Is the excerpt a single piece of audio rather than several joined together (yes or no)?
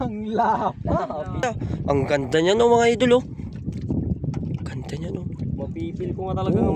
no